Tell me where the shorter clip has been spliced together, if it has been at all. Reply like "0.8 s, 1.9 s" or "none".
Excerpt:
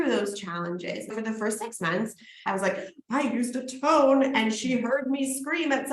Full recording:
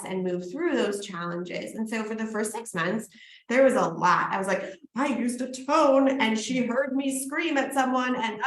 1.1 s, 2.4 s